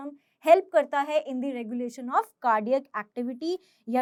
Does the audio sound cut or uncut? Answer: uncut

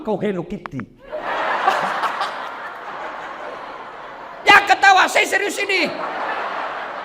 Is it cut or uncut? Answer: cut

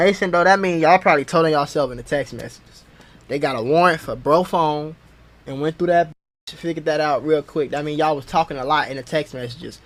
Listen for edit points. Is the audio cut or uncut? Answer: uncut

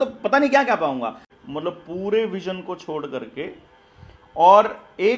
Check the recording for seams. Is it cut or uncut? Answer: cut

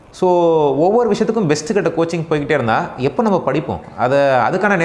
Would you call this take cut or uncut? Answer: uncut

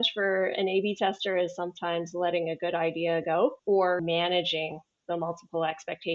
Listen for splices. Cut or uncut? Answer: cut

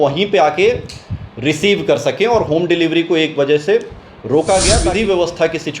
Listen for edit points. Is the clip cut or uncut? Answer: cut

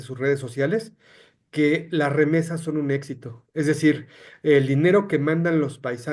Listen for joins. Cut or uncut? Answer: uncut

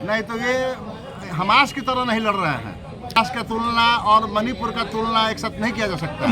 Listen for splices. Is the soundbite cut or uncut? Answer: cut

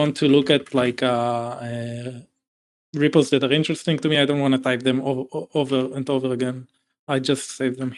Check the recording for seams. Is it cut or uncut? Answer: uncut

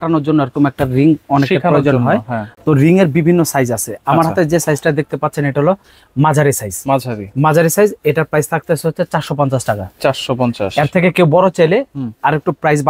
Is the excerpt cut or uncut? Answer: uncut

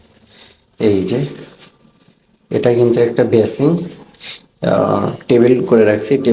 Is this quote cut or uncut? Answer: uncut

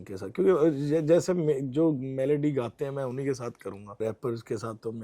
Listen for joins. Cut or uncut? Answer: cut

